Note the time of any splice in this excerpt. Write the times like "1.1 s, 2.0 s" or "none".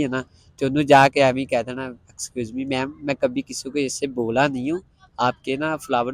none